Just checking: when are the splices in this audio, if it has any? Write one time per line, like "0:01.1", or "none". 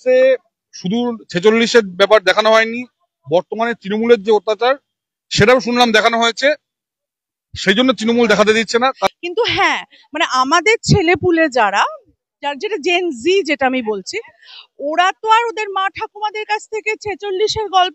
0:08.8